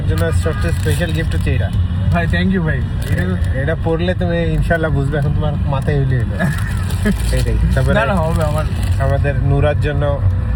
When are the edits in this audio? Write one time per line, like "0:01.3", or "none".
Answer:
none